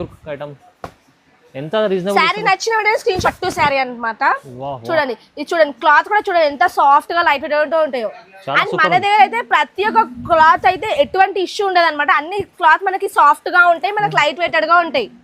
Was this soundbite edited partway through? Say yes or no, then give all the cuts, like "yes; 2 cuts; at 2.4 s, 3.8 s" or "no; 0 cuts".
yes; 1 cut; at 3.2 s